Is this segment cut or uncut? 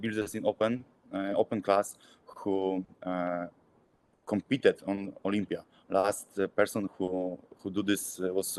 uncut